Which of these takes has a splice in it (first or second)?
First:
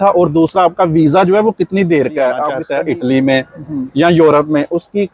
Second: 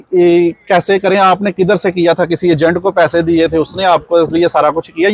first